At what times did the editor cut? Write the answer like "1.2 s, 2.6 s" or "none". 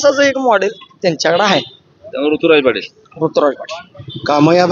none